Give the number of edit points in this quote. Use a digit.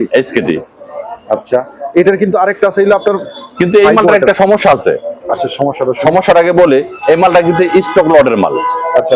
0